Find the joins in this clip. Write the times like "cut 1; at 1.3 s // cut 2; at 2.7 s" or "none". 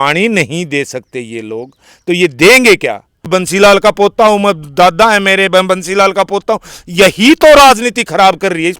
cut 1; at 3.3 s

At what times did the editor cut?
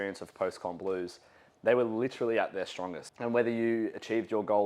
cut 1; at 3.0 s

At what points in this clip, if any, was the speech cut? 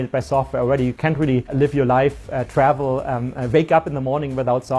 cut 1; at 1.5 s

